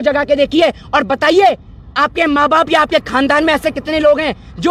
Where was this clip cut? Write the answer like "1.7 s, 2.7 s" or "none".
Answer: none